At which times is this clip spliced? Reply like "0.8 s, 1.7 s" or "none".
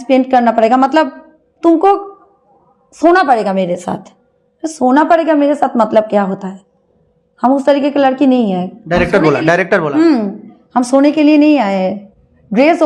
none

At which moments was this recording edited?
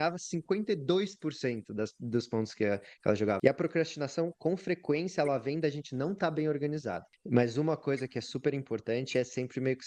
3.4 s, 7.1 s

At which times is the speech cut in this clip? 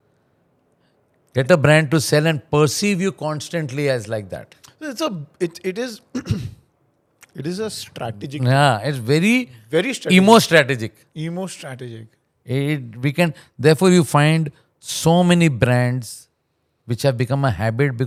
none

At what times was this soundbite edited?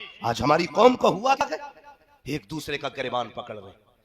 1.4 s

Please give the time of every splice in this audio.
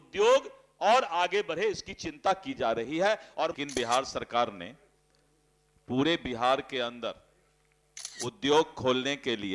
3.5 s

